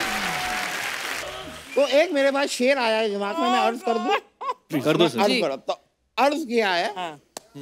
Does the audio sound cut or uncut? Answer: cut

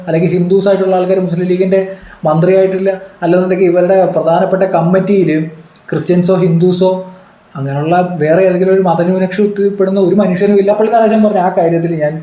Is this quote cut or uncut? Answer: cut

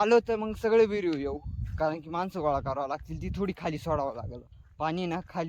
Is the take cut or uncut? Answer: uncut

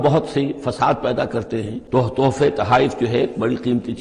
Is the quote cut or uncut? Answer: cut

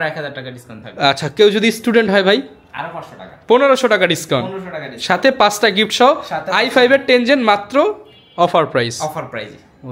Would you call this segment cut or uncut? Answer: uncut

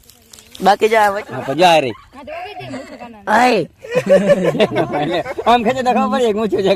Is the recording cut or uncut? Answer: cut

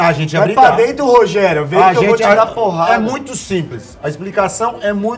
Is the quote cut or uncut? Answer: uncut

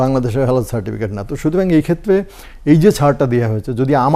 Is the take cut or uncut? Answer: uncut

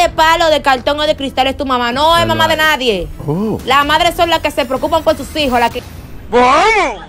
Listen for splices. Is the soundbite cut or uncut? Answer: cut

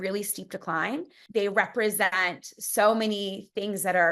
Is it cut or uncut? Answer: cut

